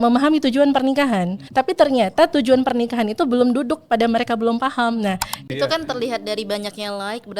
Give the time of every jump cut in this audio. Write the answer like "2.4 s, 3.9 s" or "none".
1.4 s, 5.3 s